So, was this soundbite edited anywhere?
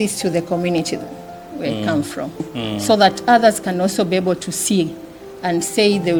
no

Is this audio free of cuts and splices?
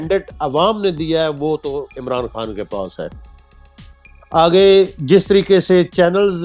yes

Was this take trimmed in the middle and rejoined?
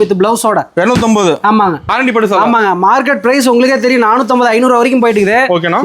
yes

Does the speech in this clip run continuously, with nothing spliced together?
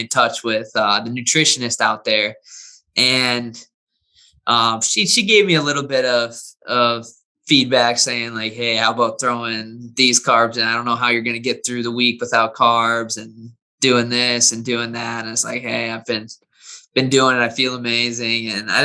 yes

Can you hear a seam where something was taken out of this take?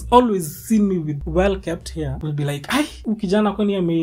yes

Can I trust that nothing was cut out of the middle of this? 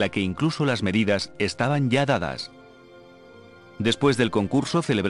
yes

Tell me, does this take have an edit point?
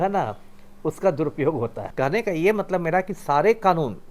no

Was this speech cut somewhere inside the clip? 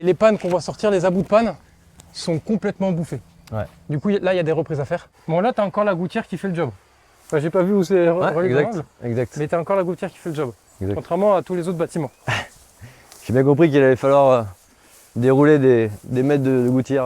yes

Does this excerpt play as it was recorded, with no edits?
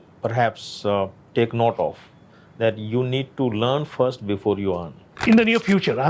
no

